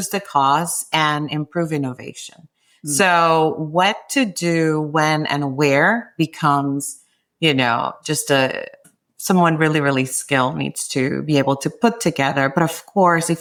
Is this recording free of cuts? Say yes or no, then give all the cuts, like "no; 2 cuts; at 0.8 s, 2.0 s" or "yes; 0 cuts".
yes; 0 cuts